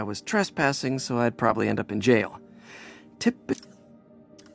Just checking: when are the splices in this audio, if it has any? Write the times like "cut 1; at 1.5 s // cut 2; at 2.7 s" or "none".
cut 1; at 3.6 s